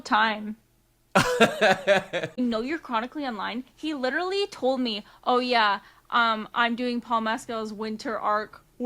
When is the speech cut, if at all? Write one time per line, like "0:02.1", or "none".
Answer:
0:02.4